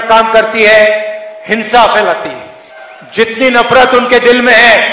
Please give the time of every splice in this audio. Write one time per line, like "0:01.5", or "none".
0:02.8